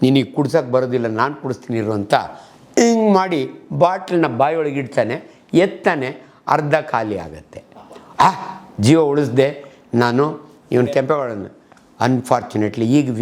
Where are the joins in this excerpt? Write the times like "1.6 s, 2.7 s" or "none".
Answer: none